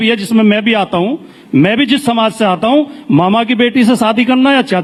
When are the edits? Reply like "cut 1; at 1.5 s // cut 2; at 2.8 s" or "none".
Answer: none